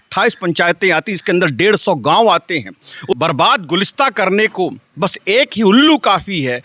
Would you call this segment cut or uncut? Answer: cut